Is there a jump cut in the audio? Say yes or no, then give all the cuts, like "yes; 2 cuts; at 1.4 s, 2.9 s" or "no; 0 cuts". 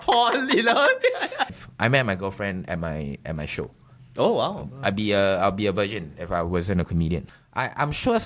yes; 2 cuts; at 1.6 s, 7.4 s